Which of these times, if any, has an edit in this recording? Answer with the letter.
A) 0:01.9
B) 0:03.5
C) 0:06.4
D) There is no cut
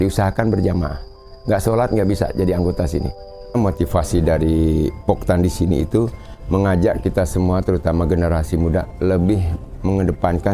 B